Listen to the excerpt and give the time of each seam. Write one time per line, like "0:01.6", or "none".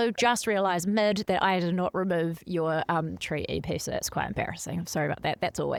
none